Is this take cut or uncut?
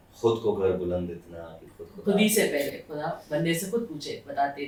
uncut